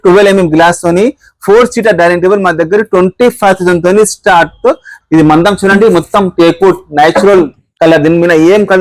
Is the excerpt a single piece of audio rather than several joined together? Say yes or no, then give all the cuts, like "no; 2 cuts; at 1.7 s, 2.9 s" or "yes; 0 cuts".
no; 1 cut; at 5.0 s